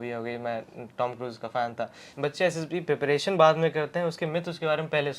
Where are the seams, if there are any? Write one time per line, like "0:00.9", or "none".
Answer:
0:02.0